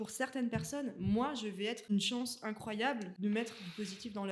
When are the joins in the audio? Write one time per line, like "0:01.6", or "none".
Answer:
0:01.9
0:03.1